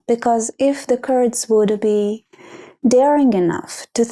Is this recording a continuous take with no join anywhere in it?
yes; 0 cuts

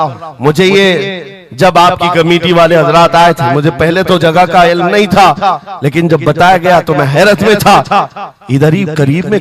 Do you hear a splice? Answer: no; 0 cuts

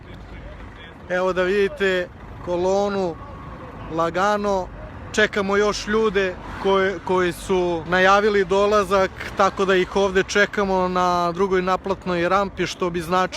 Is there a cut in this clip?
yes; 1 cut; at 7.9 s

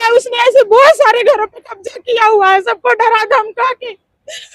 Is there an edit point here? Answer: no; 0 cuts

